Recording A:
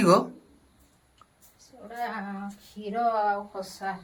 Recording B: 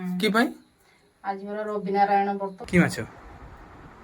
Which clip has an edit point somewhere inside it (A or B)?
B